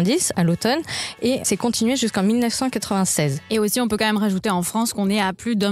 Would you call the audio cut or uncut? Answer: cut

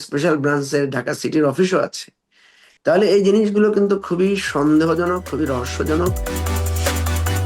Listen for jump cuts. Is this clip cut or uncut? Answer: cut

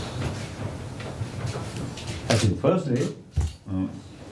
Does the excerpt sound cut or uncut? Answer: uncut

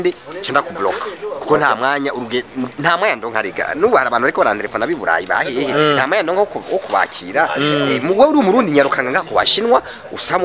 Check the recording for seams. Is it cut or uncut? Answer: uncut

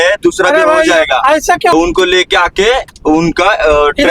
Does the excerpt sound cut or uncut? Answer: cut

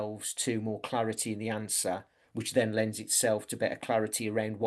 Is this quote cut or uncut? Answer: uncut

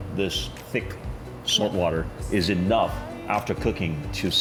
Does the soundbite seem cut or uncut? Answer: uncut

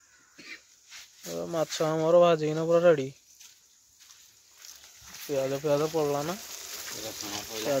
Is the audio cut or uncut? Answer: uncut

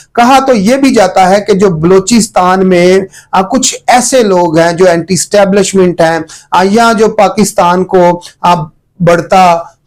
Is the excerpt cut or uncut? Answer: uncut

